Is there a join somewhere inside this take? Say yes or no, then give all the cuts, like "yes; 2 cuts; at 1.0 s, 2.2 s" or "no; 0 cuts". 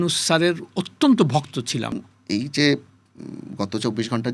yes; 1 cut; at 1.9 s